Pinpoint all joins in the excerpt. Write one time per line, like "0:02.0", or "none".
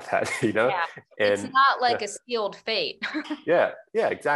none